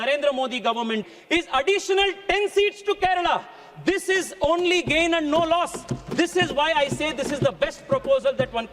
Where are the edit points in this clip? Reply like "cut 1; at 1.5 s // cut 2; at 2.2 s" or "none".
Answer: cut 1; at 1.0 s